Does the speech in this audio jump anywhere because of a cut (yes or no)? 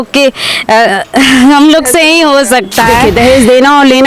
yes